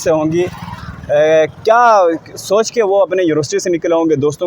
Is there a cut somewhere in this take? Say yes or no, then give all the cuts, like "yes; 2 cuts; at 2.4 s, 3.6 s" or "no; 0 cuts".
no; 0 cuts